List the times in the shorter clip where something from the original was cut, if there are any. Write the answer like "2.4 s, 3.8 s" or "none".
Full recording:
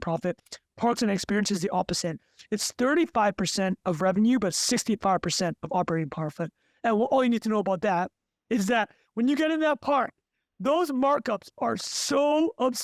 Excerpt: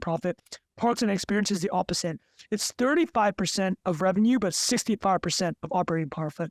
none